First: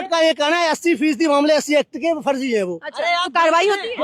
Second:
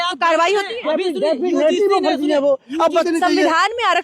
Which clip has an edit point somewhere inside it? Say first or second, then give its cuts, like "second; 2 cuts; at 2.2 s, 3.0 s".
second; 1 cut; at 3.0 s